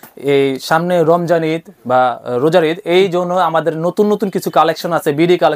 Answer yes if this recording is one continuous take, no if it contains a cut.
yes